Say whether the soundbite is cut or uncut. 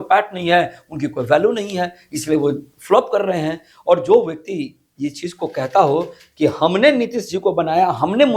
uncut